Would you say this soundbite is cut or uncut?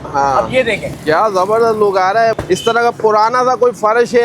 cut